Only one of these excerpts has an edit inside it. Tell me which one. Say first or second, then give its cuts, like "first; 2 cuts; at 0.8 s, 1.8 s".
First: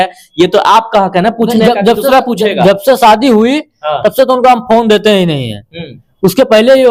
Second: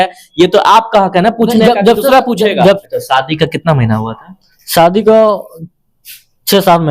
second; 1 cut; at 2.8 s